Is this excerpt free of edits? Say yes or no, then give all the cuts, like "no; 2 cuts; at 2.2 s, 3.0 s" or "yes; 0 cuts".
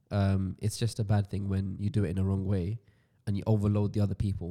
yes; 0 cuts